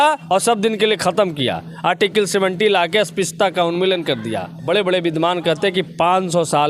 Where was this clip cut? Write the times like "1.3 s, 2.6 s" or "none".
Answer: none